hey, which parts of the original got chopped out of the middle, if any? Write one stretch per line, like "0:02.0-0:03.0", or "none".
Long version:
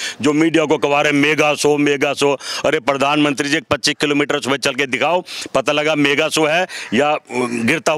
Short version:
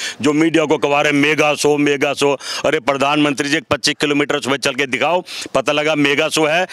none